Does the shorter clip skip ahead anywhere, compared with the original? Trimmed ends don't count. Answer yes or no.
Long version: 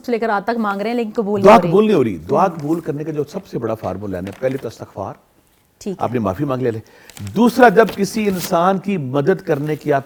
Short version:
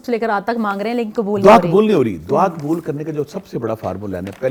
no